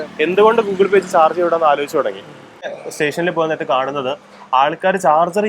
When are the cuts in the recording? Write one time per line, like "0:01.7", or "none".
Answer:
0:02.8